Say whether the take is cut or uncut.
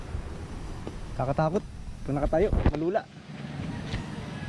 uncut